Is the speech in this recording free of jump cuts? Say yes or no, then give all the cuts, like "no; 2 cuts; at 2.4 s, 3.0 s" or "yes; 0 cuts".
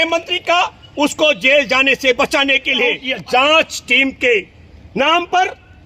no; 1 cut; at 3.1 s